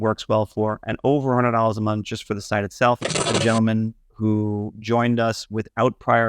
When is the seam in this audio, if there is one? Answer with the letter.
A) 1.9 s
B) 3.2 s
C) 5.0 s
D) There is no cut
B